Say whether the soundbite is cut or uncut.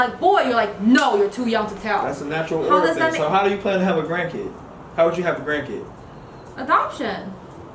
uncut